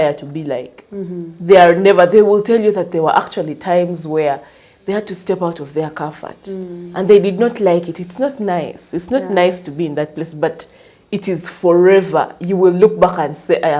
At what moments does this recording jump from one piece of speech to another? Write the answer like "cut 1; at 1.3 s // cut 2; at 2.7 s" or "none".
none